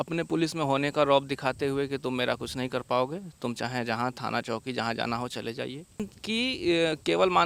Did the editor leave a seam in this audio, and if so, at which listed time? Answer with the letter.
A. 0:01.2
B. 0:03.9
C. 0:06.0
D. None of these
C